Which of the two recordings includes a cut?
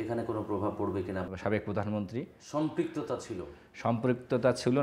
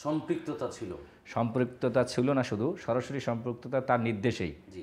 first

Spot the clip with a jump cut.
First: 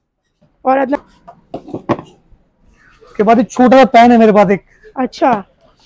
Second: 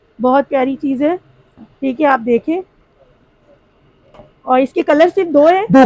first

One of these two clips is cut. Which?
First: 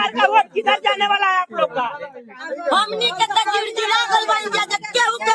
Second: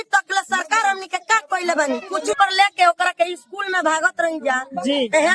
second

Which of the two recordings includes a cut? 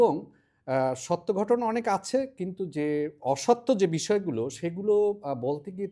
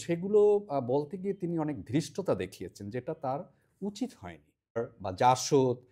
second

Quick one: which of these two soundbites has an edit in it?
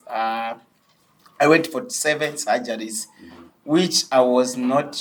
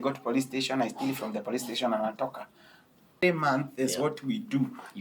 second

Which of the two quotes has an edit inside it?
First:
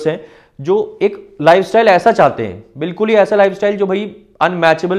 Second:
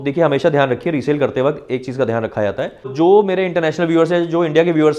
second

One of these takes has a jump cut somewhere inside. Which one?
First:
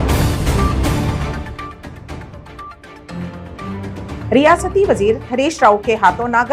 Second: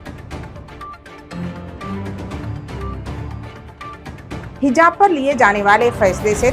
second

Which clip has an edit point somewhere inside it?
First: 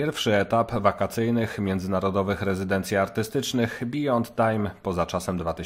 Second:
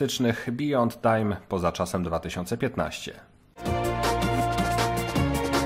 second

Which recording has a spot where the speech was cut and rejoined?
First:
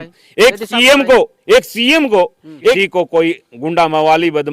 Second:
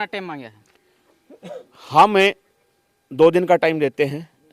first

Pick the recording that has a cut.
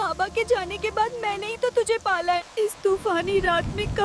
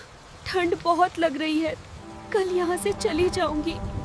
first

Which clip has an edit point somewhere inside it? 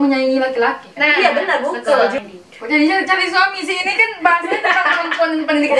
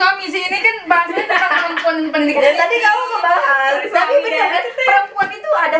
first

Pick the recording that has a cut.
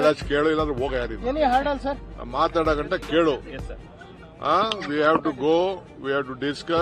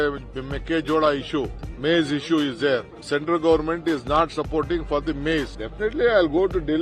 second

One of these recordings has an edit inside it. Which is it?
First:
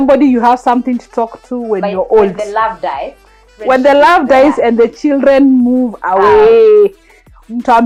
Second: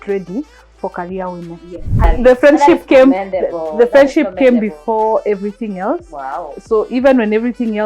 second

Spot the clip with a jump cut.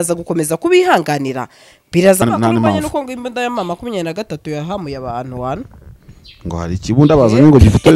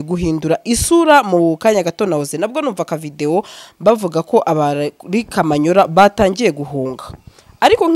first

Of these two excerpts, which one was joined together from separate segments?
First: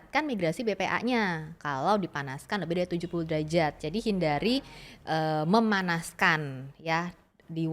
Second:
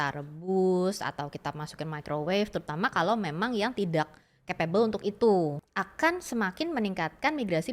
second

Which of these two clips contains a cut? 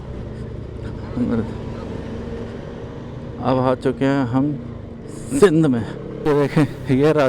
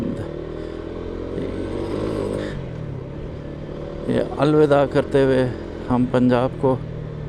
first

